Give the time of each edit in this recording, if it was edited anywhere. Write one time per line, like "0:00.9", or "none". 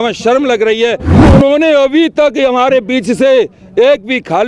0:01.3